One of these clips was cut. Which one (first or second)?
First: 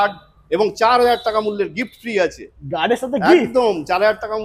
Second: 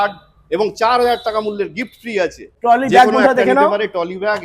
second